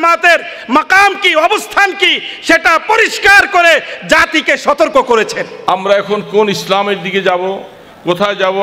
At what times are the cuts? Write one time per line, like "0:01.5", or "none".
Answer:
0:05.5

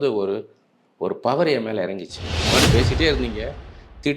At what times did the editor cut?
0:02.4

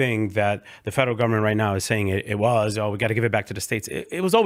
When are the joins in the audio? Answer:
none

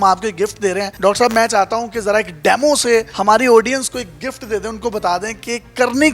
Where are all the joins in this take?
0:00.9
0:03.1

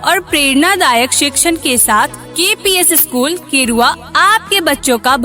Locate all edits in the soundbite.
none

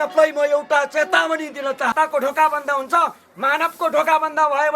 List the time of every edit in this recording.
0:01.9

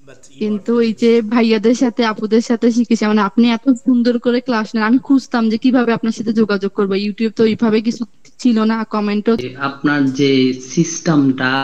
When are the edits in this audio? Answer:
0:09.4

